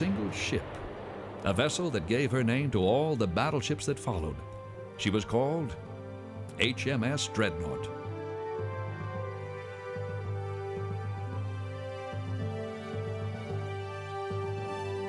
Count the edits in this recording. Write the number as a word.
one